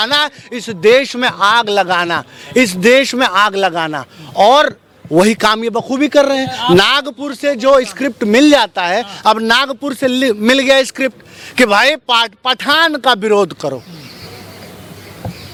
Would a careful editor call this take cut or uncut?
uncut